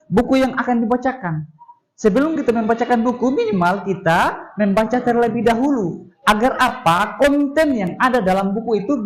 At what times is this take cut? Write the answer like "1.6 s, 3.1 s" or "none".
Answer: none